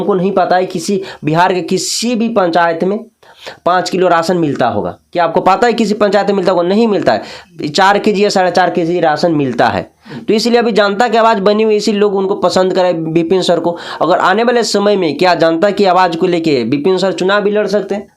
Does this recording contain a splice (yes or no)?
no